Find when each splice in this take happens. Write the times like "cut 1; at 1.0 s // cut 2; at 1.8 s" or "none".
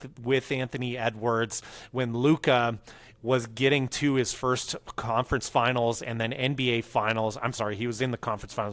none